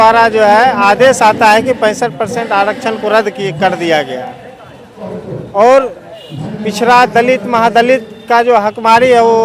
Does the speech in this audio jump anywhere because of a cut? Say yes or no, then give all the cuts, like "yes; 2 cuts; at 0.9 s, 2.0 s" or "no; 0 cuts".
no; 0 cuts